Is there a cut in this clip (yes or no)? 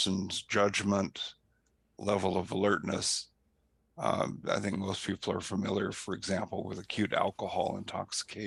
no